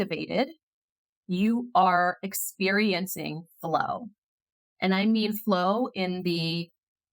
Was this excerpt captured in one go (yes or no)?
yes